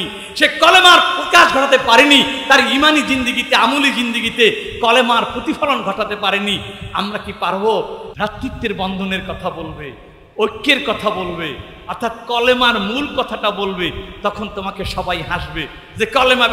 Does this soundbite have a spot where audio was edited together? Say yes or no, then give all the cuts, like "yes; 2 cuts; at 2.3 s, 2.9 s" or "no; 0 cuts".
yes; 1 cut; at 8.0 s